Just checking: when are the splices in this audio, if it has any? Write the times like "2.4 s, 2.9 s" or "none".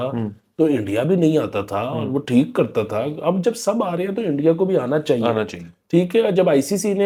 none